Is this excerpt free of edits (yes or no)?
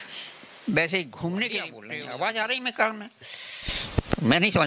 no